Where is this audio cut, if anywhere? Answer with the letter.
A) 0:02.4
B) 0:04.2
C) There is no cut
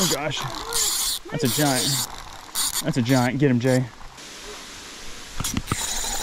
B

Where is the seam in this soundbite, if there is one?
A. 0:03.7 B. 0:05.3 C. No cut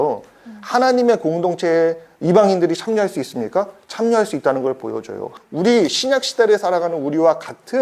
B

